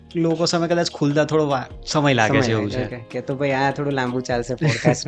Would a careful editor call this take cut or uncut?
cut